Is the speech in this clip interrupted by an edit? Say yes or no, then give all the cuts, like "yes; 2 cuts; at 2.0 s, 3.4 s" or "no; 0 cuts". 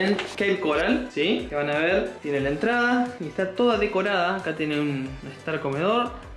no; 0 cuts